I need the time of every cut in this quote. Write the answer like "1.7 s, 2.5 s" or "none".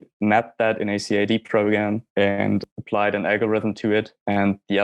2.6 s